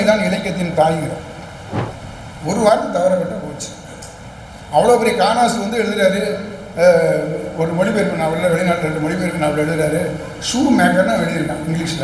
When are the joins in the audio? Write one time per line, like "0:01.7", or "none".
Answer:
0:01.9